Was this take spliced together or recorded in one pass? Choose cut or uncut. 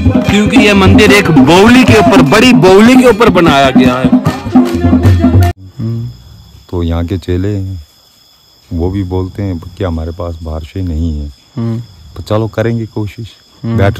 cut